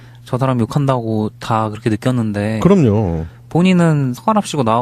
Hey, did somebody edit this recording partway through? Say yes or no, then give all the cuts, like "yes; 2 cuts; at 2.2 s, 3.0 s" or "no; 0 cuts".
yes; 1 cut; at 2.0 s